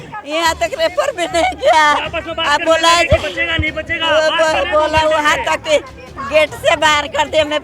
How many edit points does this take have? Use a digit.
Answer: 0